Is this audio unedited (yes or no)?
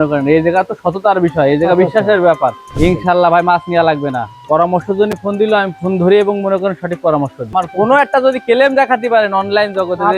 no